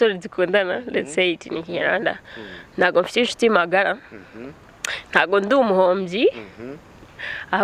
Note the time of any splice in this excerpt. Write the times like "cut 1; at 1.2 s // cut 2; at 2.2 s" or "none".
none

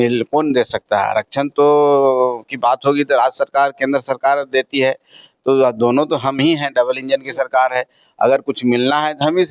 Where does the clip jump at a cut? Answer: none

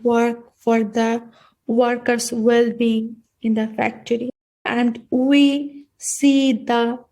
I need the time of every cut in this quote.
cut 1; at 4.7 s

